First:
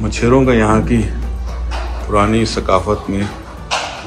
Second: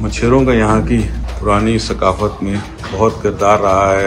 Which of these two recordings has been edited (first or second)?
second